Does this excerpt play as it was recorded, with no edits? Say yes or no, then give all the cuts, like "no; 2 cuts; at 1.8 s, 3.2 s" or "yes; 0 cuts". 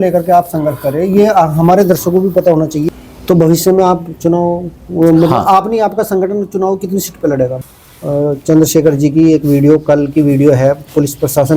no; 2 cuts; at 3.1 s, 7.6 s